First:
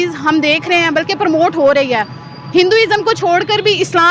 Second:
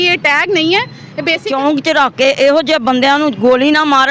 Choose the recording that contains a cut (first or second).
second